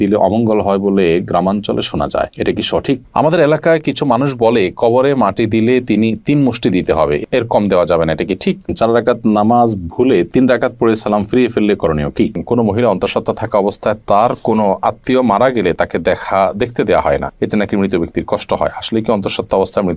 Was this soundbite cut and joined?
yes; 3 cuts; at 3.1 s, 8.7 s, 12.4 s

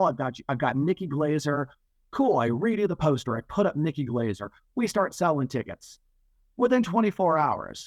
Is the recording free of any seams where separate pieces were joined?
yes; 0 cuts

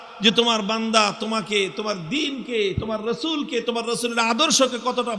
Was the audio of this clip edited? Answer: no; 0 cuts

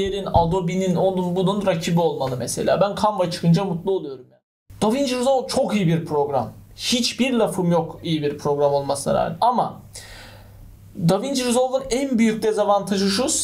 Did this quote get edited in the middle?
yes; 1 cut; at 4.1 s

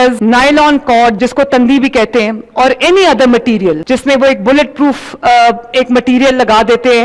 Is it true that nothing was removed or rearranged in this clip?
yes; 0 cuts

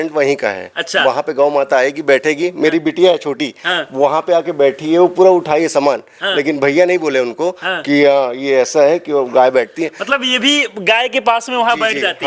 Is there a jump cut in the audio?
no; 0 cuts

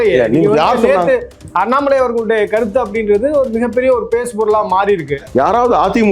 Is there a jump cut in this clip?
yes; 1 cut; at 5.1 s

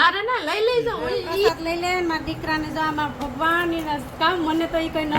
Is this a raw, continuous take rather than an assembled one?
no; 1 cut; at 1.5 s

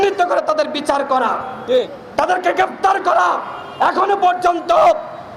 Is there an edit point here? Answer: no; 0 cuts

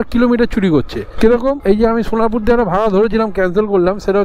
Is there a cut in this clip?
no; 0 cuts

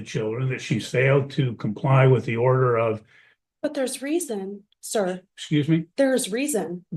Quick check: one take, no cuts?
yes; 0 cuts

